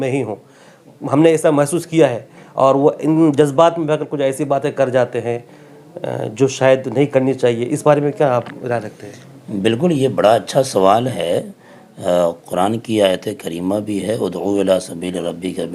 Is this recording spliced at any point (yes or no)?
no